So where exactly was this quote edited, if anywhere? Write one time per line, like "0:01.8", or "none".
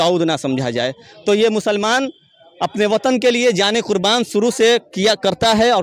none